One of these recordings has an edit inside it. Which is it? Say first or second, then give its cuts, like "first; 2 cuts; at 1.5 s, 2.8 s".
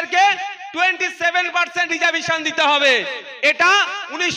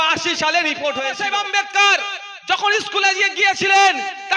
second; 1 cut; at 1.1 s